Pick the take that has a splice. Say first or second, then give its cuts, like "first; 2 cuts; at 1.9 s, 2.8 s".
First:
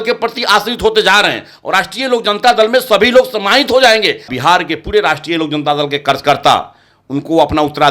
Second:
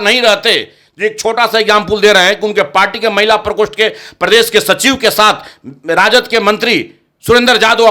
first; 1 cut; at 4.3 s